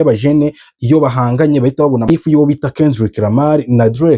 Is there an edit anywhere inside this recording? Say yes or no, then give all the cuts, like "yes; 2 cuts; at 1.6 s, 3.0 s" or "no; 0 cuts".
yes; 1 cut; at 2.2 s